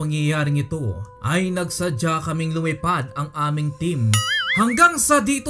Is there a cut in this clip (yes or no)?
yes